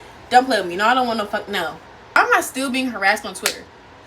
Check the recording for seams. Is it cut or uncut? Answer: cut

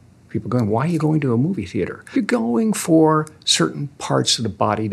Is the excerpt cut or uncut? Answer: cut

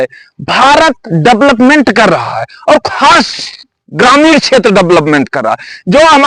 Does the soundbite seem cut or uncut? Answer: uncut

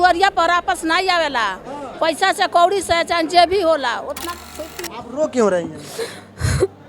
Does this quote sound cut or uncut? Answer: cut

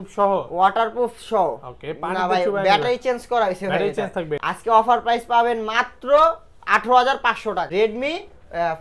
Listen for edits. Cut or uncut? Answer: cut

